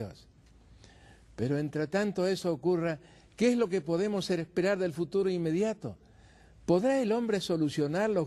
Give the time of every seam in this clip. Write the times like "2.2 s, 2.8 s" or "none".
5.8 s

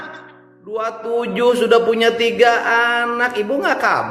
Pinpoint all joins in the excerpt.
none

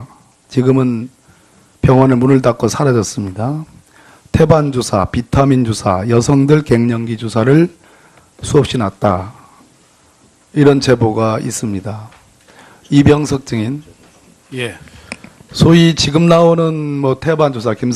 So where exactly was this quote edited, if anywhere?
12.7 s

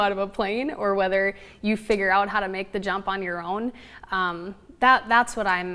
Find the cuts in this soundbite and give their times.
none

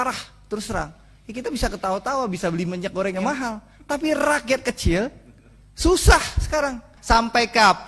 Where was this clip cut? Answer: 3.2 s, 6.9 s

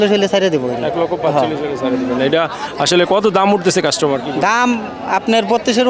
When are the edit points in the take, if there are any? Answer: none

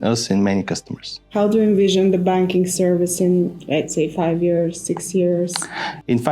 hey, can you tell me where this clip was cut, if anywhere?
1.2 s

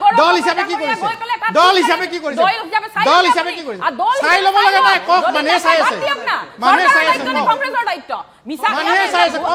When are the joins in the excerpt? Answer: none

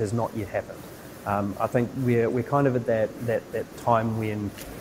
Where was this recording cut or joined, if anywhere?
none

